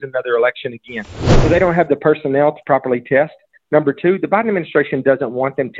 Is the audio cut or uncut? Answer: cut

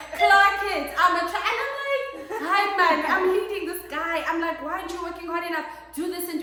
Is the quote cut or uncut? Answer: uncut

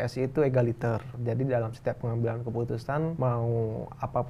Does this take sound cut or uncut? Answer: cut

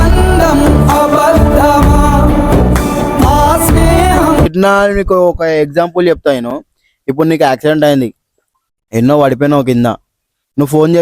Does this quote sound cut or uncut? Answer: cut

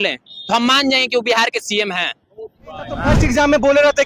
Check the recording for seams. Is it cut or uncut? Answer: cut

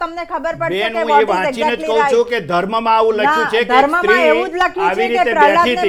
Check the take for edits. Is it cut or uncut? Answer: uncut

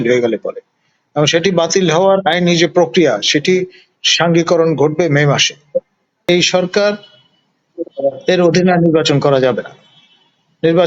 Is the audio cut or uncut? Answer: cut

